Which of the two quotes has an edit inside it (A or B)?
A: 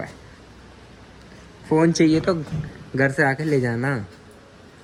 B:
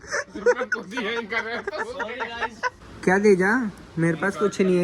B